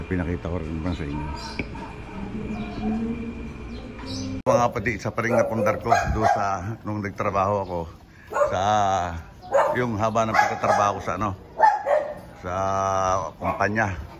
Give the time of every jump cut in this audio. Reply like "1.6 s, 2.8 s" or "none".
4.4 s